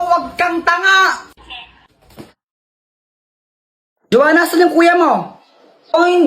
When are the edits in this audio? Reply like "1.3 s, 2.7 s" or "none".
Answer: 1.2 s